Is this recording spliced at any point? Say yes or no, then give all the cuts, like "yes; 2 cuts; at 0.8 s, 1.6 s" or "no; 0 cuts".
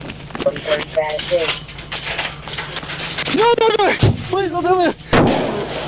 yes; 1 cut; at 4.0 s